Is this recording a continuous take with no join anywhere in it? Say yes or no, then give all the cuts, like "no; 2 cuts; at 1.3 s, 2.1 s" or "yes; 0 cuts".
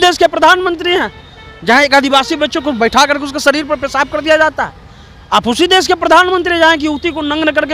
yes; 0 cuts